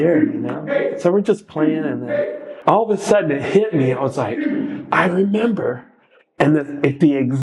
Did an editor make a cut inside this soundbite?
yes; 1 cut; at 2.5 s

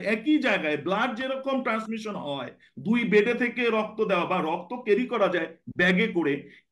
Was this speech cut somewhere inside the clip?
no; 0 cuts

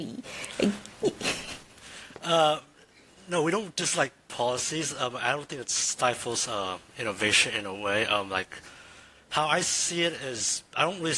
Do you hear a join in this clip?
no; 0 cuts

